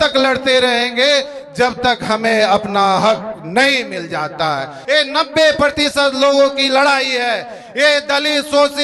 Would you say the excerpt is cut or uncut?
cut